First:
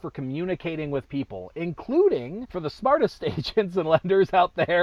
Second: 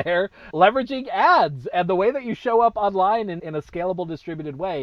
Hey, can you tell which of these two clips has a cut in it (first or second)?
first